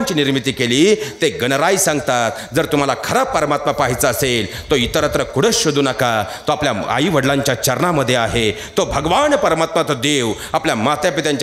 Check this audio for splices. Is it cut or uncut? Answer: uncut